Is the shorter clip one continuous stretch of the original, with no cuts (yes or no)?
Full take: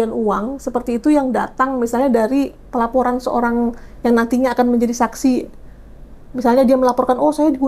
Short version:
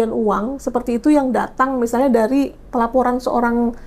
yes